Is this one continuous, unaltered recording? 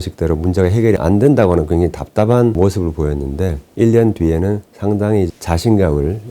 no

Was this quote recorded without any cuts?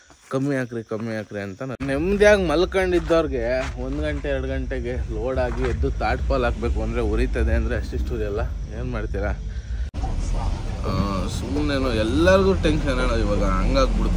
no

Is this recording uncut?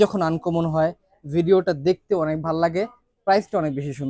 yes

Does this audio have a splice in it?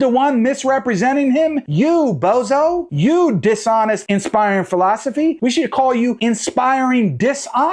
yes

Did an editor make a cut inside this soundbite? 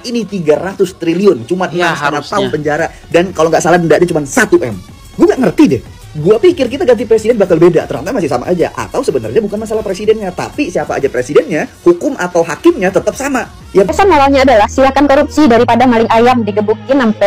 yes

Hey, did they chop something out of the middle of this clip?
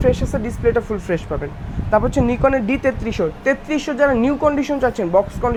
no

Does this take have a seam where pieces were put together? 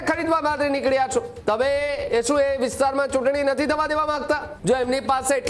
yes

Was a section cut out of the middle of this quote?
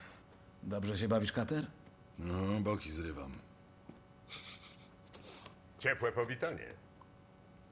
no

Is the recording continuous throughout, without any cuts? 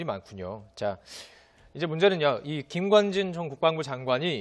no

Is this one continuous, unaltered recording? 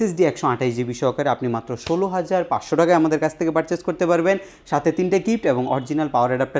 yes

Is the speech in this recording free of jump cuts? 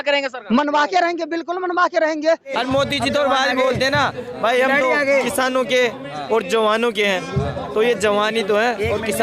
no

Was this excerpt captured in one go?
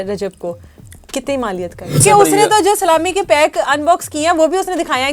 no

